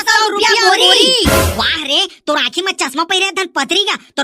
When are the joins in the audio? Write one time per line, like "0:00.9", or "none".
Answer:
0:01.3